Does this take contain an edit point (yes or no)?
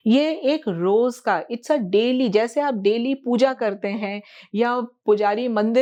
no